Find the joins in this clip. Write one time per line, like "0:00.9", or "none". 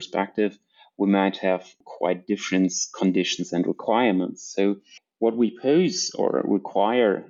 none